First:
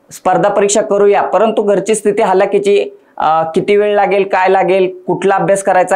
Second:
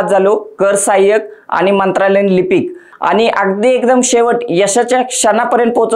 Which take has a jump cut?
second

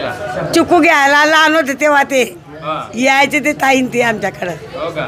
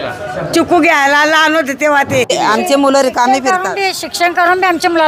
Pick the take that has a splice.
second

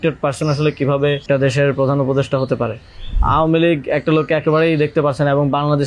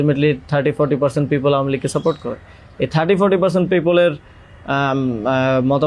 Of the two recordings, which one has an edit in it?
first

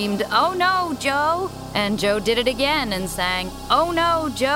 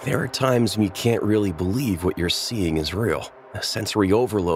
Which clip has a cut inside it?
first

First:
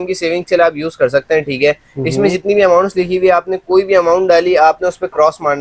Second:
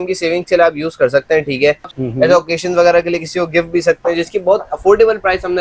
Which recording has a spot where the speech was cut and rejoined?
second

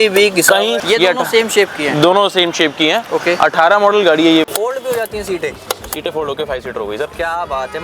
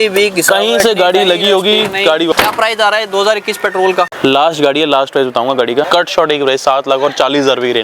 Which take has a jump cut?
first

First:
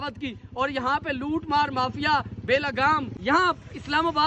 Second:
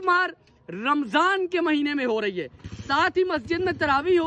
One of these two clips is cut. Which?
first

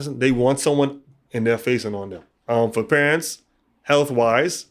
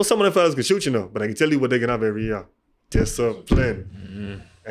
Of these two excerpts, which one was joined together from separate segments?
first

